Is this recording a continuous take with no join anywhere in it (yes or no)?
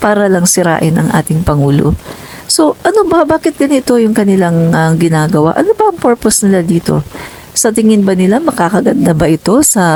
yes